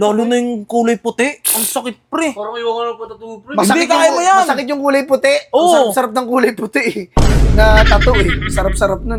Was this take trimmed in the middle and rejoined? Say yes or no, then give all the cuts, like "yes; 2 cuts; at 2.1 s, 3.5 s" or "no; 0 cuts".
no; 0 cuts